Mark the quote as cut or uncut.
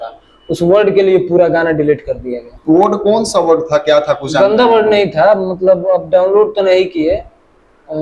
uncut